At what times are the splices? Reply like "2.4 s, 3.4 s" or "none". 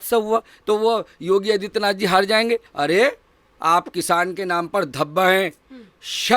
2.7 s